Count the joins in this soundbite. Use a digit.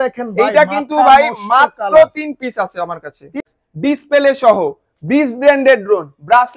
1